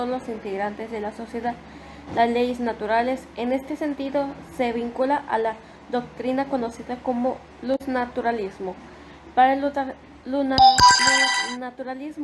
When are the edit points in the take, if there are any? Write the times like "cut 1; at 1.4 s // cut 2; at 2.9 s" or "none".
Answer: cut 1; at 7.9 s

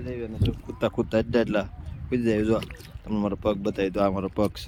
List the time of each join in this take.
none

